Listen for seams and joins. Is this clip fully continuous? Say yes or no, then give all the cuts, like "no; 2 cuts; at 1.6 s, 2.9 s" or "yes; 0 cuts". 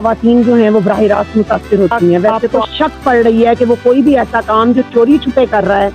no; 1 cut; at 2.5 s